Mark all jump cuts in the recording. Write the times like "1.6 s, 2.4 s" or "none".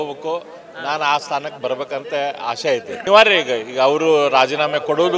3.0 s